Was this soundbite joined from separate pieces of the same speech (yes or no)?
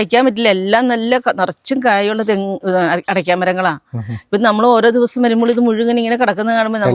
no